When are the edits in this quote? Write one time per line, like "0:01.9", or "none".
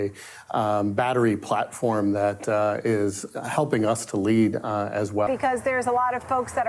0:05.3